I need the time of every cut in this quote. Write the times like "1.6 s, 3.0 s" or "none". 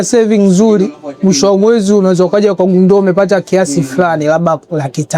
none